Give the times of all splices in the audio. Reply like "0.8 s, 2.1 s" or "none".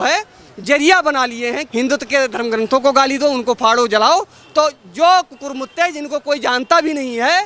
1.6 s